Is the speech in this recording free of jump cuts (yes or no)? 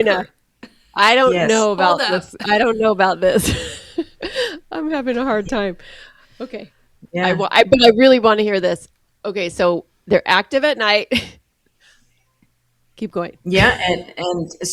yes